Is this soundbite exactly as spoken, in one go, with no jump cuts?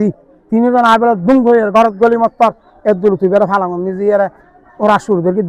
yes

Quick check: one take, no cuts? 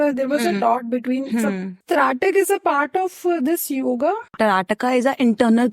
no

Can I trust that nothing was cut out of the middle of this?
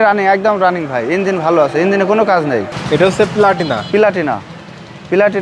no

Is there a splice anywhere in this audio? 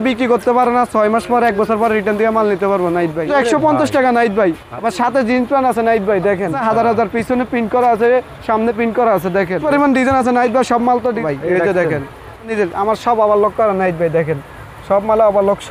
yes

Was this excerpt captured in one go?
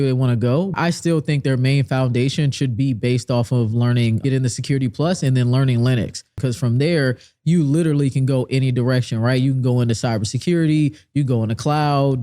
no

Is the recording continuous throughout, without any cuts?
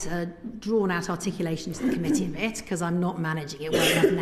yes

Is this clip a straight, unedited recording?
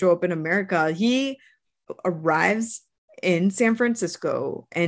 yes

